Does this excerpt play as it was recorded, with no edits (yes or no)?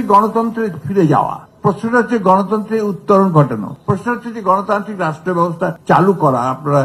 no